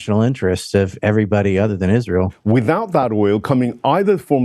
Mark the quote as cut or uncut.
cut